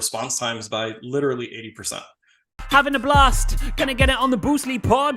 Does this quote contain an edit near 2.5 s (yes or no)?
yes